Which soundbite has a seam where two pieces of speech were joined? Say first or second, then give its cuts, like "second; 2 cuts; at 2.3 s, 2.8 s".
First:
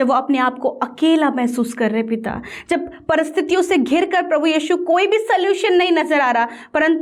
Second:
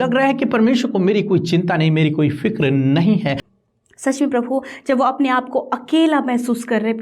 second; 1 cut; at 3.4 s